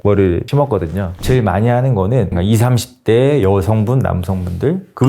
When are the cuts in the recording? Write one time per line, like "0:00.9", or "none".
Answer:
0:01.2
0:02.3